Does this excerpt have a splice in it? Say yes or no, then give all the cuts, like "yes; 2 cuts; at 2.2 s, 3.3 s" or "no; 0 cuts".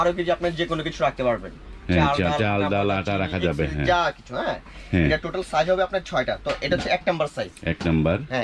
no; 0 cuts